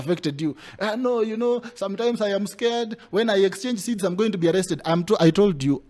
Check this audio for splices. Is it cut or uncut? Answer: uncut